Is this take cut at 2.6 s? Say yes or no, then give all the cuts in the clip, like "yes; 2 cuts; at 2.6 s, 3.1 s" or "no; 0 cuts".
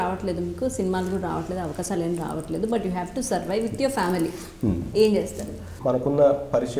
no; 1 cut; at 5.7 s